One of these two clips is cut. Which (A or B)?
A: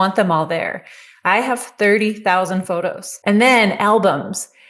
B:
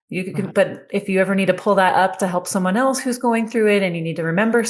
A